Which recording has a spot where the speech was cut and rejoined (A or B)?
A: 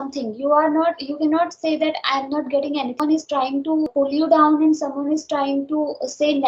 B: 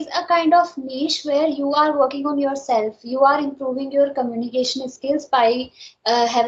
A